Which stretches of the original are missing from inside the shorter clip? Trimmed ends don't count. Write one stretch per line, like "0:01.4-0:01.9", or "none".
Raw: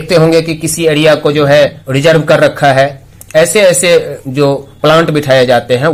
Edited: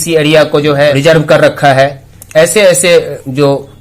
0:01.7-0:01.9